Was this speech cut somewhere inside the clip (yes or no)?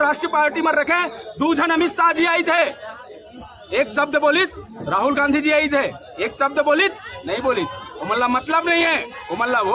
no